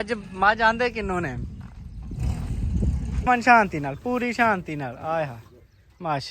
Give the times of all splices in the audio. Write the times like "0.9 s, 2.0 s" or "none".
3.3 s